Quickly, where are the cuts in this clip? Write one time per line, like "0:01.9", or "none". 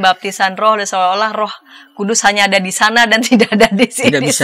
none